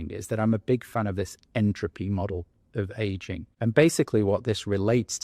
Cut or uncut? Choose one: cut